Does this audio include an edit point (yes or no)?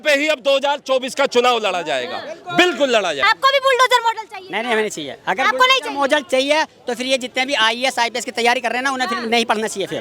yes